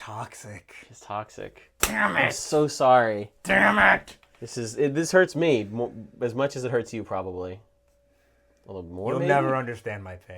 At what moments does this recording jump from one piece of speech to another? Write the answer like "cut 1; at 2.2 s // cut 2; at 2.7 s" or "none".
none